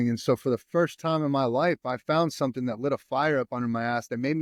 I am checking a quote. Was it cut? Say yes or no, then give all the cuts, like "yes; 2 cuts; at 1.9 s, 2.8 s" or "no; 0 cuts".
no; 0 cuts